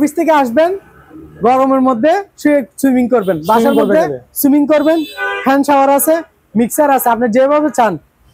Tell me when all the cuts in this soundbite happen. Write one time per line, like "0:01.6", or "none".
none